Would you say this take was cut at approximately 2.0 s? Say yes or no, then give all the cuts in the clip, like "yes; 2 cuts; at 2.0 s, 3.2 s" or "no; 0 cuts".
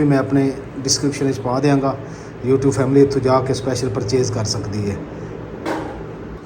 no; 0 cuts